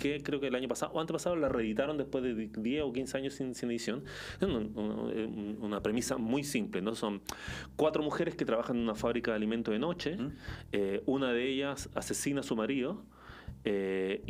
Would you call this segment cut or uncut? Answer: uncut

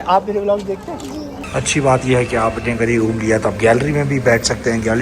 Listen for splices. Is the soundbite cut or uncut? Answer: cut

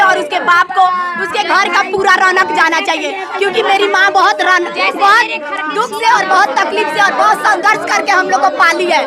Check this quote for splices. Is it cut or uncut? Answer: uncut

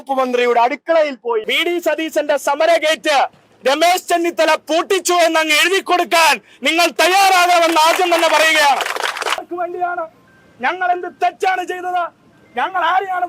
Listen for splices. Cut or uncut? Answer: cut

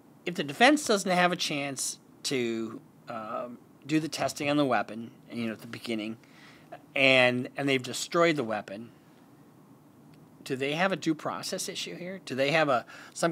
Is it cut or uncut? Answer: uncut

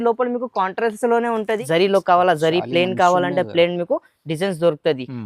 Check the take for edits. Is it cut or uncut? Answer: cut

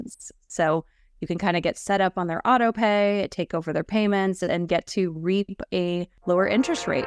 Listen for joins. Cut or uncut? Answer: cut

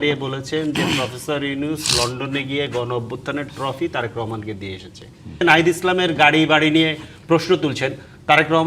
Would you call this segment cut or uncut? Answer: cut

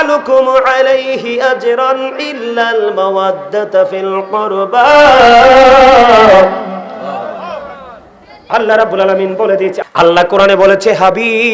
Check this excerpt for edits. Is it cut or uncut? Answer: cut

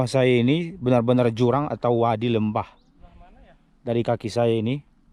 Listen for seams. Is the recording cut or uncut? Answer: uncut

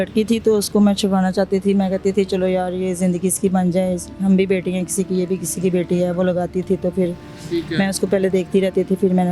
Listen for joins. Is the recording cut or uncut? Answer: uncut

